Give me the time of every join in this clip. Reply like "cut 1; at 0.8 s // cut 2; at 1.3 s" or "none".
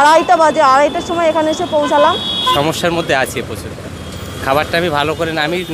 cut 1; at 2.5 s

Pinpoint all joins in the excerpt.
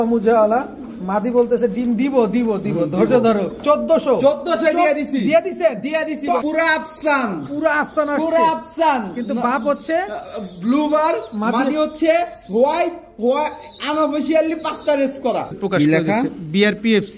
cut 1; at 3.6 s // cut 2; at 6.4 s // cut 3; at 15.6 s

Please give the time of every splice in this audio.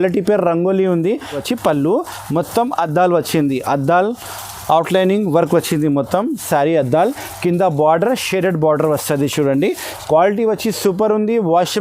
cut 1; at 1.4 s // cut 2; at 9.9 s

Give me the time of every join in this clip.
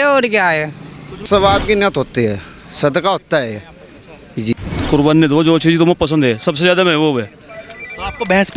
cut 1; at 1.3 s // cut 2; at 4.5 s

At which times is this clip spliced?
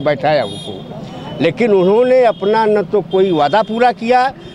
none

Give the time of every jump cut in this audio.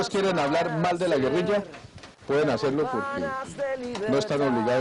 none

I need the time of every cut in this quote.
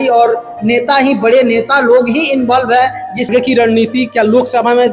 cut 1; at 3.1 s

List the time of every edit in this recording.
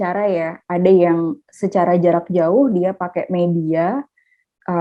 none

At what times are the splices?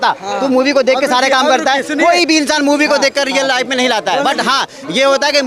none

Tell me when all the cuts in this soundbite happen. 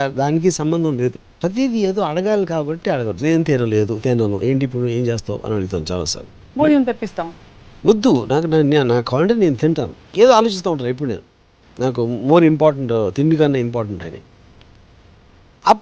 cut 1; at 1.4 s // cut 2; at 10.0 s

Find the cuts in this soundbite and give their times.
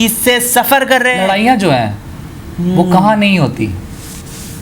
cut 1; at 1.2 s

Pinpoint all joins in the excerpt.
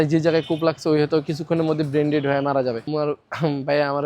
cut 1; at 2.8 s

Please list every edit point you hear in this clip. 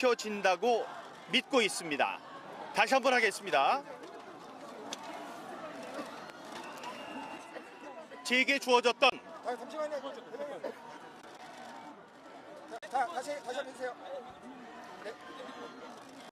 cut 1; at 5.1 s

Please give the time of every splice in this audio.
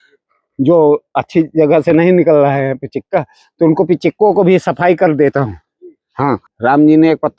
cut 1; at 6.5 s

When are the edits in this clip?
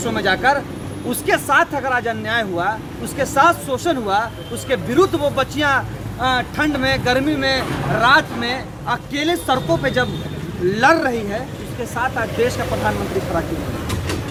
none

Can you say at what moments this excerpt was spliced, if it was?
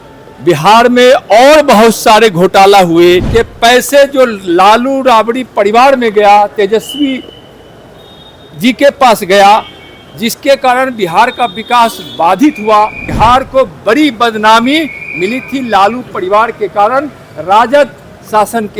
cut 1; at 3.3 s // cut 2; at 13.0 s

